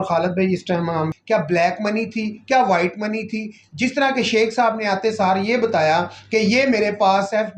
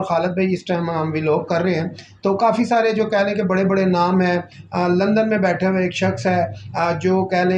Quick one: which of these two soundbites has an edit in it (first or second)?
first